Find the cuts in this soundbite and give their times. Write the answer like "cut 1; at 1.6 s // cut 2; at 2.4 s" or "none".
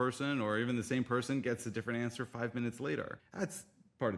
cut 1; at 3.2 s